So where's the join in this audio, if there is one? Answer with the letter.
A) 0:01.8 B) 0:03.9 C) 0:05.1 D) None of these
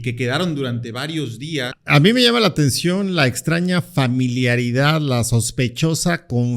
A